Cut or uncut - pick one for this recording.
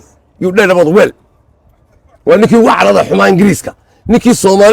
uncut